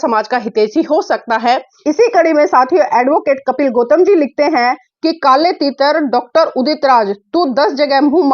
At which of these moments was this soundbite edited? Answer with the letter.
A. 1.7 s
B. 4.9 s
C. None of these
A